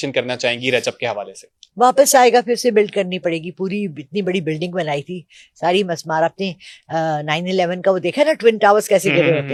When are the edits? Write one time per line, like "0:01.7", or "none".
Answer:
none